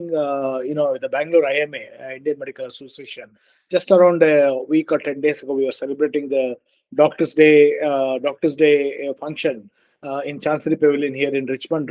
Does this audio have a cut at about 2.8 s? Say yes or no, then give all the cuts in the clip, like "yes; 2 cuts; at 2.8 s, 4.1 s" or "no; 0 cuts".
no; 0 cuts